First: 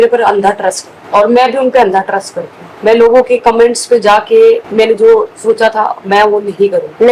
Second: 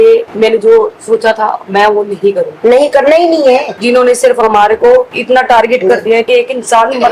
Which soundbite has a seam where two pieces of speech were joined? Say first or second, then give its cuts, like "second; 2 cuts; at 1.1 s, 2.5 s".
second; 2 cuts; at 3.7 s, 6.3 s